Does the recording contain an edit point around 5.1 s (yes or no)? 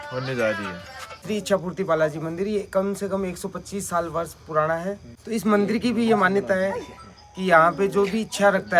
yes